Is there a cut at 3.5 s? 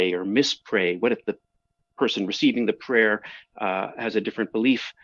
no; 0 cuts

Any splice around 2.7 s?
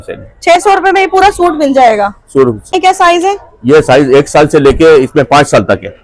yes; 1 cut; at 2.7 s

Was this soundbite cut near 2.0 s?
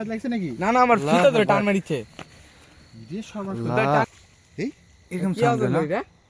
no; 1 cut; at 4.1 s

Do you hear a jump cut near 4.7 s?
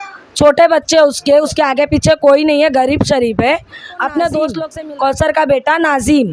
yes; 1 cut; at 4.7 s

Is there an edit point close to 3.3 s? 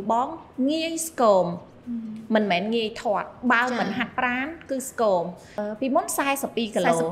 no; 1 cut; at 5.5 s

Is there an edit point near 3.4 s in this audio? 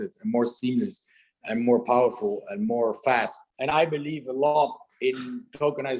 yes; 1 cut; at 3.4 s

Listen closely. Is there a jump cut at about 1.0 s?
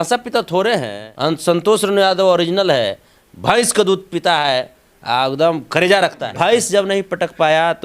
yes; 2 cuts; at 1.0 s, 6.2 s

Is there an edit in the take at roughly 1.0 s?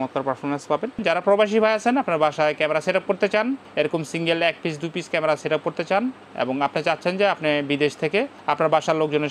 yes; 1 cut; at 1.0 s

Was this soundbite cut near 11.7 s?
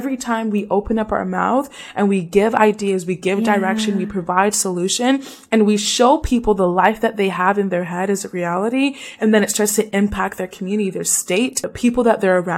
yes; 1 cut; at 11.7 s

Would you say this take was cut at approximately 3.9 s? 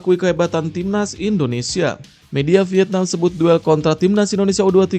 no; 1 cut; at 2.1 s

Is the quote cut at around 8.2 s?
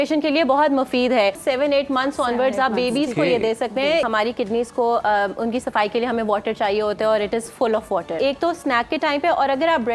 yes; 3 cuts; at 1.4 s, 4.1 s, 8.2 s

